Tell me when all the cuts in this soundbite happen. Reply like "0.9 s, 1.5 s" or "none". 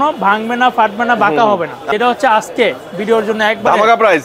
1.8 s